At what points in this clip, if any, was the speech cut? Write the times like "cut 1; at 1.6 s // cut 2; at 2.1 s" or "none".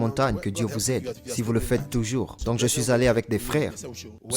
cut 1; at 2.3 s